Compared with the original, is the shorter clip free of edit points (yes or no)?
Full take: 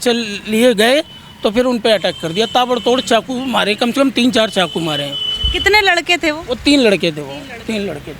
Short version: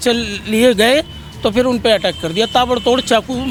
yes